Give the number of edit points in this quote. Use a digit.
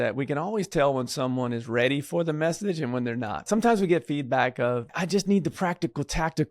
2